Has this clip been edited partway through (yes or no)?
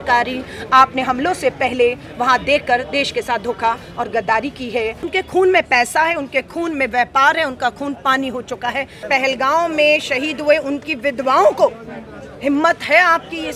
yes